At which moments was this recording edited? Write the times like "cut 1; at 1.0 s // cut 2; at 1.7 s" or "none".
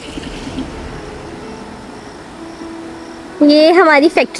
none